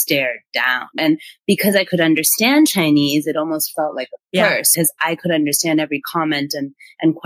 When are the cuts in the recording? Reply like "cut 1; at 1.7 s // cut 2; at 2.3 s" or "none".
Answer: cut 1; at 1.0 s // cut 2; at 4.7 s